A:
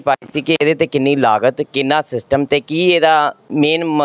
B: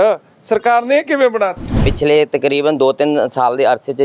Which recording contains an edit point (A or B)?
B